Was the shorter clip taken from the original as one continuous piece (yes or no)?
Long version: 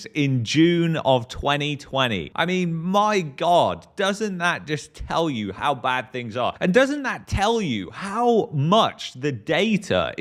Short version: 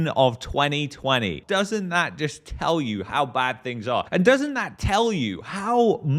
no